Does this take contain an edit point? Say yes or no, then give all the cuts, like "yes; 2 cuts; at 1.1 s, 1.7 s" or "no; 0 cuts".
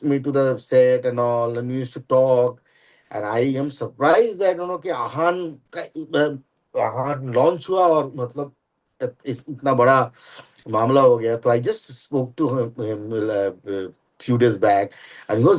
no; 0 cuts